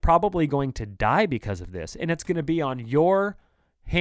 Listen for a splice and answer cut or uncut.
uncut